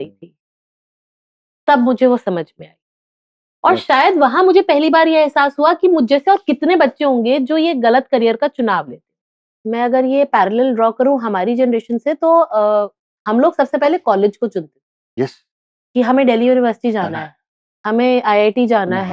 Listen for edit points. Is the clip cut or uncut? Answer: cut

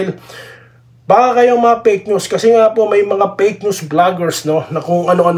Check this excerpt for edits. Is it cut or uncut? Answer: uncut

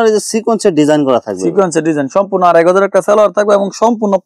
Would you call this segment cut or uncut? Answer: uncut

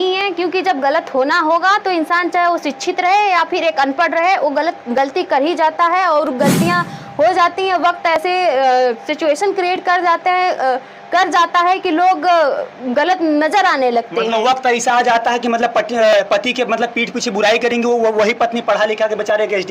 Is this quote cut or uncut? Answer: uncut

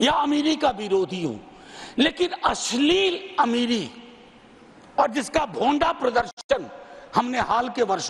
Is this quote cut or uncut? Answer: uncut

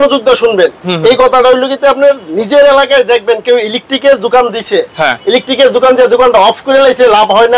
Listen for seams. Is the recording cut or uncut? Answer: uncut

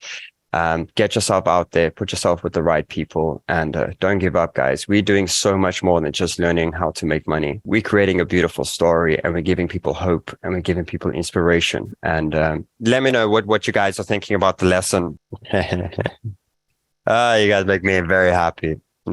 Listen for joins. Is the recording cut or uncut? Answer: cut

